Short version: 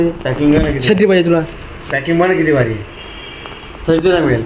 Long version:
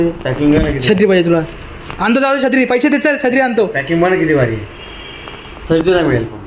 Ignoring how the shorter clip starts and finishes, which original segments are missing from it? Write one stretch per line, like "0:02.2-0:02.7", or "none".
0:01.9-0:03.8